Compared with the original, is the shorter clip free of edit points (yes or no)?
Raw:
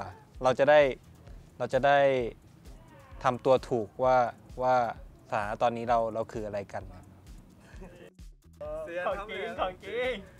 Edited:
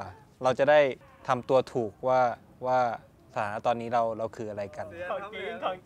no